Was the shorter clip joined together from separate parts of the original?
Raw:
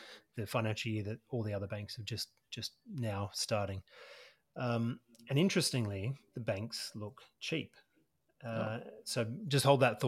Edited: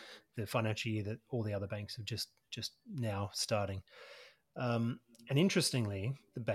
no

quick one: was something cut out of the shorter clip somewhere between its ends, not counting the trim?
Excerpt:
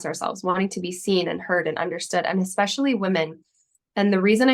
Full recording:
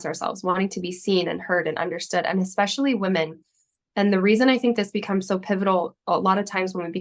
no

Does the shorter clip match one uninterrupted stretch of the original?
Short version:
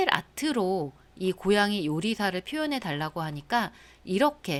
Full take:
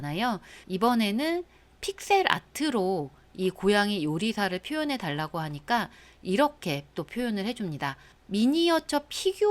yes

